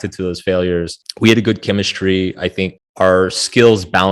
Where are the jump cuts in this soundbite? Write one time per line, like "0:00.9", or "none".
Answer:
0:01.0
0:02.8